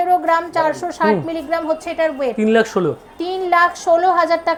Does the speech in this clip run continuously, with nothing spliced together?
yes; 0 cuts

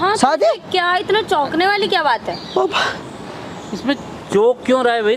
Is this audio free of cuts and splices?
yes; 0 cuts

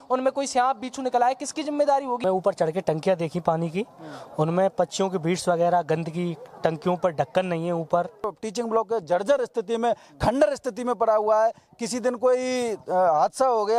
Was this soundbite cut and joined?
yes; 2 cuts; at 2.2 s, 8.4 s

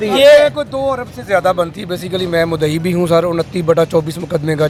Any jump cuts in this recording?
no; 0 cuts

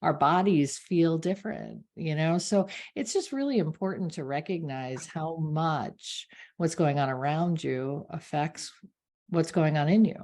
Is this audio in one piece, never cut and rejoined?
yes; 0 cuts

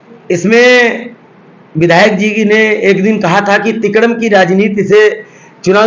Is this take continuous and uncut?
yes; 0 cuts

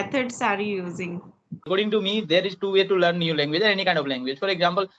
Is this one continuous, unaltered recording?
no; 1 cut; at 1.7 s

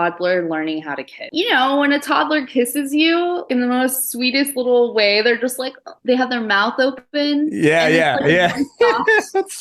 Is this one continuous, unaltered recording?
no; 2 cuts; at 1.2 s, 3.5 s

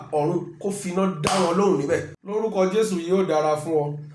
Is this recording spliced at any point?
yes; 1 cut; at 2.2 s

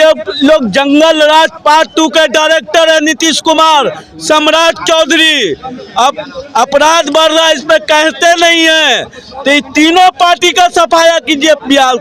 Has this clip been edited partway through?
no; 0 cuts

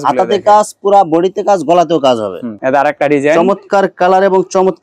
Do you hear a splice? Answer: yes; 1 cut; at 2.5 s

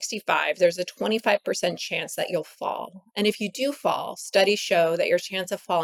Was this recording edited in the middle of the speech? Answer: no; 0 cuts

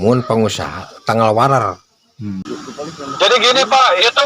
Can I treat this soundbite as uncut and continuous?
no; 1 cut; at 2.4 s

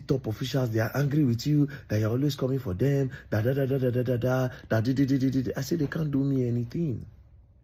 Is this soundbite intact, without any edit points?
yes; 0 cuts

